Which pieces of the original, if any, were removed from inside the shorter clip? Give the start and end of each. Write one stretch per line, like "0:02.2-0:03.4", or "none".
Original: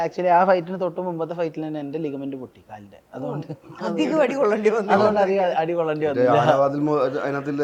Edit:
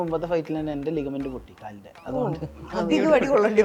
none

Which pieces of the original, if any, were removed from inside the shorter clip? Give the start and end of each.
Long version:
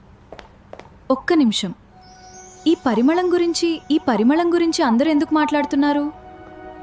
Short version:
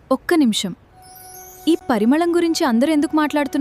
0:02.8-0:04.0

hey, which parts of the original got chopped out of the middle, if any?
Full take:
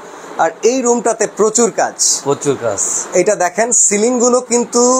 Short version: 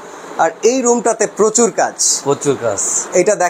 none

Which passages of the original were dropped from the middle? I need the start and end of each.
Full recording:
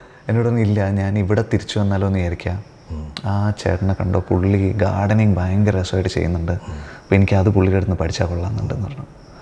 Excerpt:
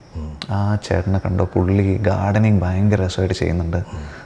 none

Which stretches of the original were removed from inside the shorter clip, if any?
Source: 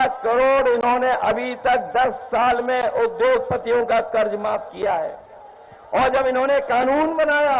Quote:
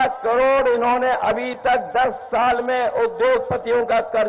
none

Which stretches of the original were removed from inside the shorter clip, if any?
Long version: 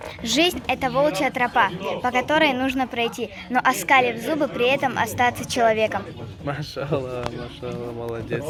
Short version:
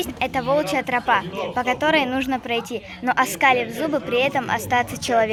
none

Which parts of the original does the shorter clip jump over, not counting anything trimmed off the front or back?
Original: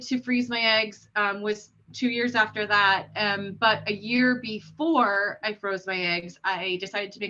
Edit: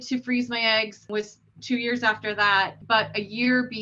0:01.0-0:01.4
0:03.1-0:03.5

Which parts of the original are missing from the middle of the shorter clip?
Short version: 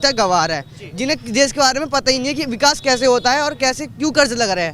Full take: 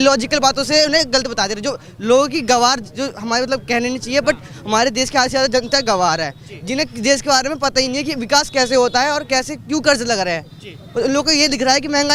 none

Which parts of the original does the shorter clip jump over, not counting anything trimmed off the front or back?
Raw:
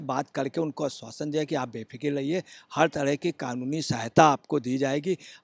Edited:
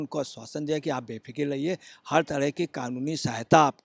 none

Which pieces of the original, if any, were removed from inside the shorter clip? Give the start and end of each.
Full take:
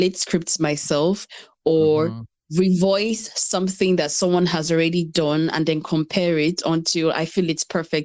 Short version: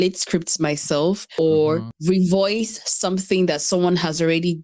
0:01.3-0:01.6
0:02.2-0:02.4

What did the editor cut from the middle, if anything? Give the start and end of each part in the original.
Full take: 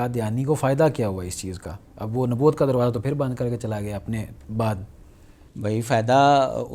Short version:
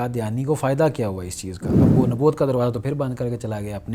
0:01.9-0:02.1

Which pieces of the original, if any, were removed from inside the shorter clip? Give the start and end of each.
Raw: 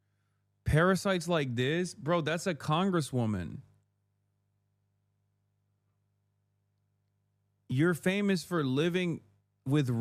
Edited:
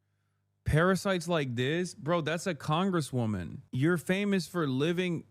0:03.6-0:07.5

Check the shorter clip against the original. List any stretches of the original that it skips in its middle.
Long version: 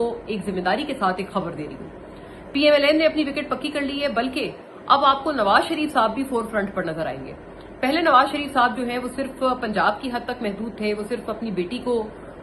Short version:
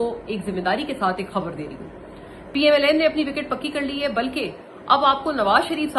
none

